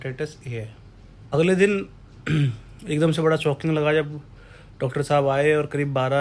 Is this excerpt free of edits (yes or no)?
no